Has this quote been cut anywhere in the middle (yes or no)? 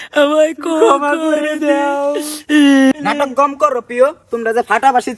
yes